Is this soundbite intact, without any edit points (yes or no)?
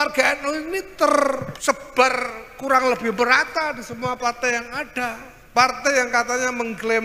no